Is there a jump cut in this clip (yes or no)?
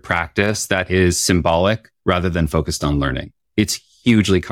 yes